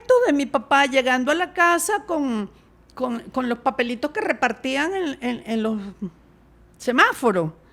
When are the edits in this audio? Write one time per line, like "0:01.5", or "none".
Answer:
none